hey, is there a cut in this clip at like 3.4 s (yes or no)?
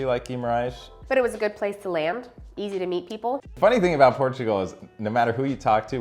yes